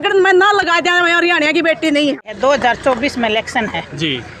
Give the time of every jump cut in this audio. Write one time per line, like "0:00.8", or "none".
0:02.3

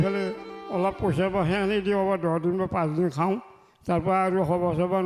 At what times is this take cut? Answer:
none

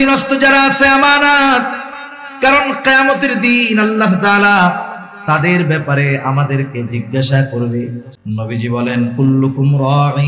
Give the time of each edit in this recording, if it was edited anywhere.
0:08.1

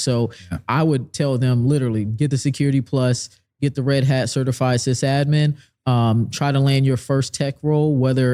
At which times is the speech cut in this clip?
none

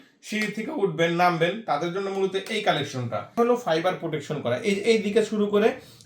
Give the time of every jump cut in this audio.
0:03.4

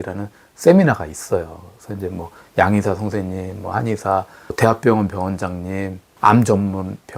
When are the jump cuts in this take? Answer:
none

